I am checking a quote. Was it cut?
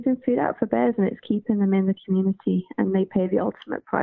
no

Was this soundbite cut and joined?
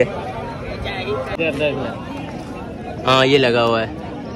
yes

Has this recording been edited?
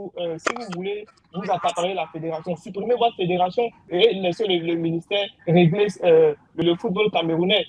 yes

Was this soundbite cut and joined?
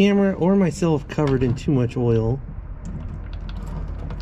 no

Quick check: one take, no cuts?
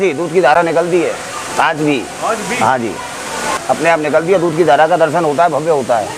no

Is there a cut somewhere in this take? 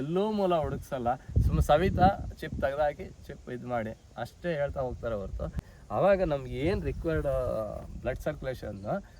yes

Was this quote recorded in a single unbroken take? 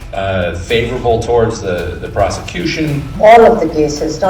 no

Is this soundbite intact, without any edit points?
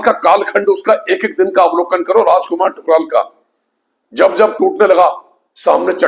yes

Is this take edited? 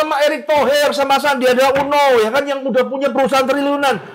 no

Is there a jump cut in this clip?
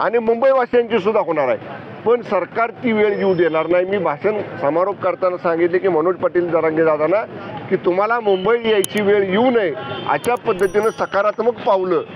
no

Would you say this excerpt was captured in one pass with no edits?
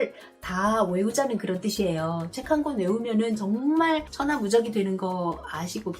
no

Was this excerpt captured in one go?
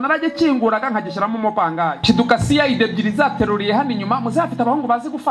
no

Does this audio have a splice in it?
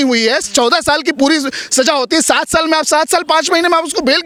no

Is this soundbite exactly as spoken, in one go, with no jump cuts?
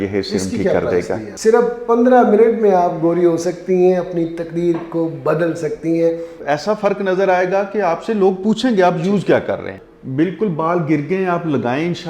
no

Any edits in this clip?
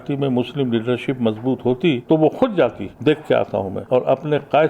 yes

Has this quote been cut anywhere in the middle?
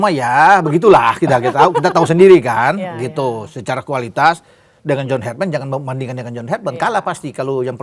no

